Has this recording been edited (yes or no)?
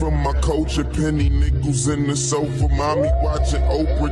yes